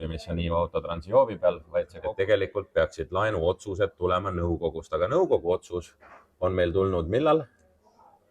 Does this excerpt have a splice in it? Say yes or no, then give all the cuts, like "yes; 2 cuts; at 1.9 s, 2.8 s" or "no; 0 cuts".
yes; 1 cut; at 1.9 s